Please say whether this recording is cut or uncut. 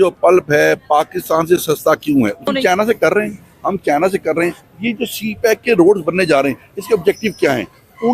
cut